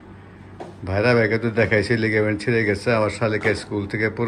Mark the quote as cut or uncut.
uncut